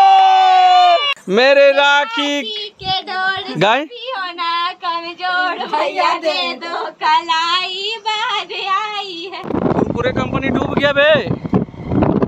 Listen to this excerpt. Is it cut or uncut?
cut